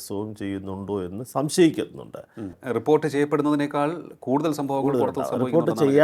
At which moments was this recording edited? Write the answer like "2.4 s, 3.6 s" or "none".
2.6 s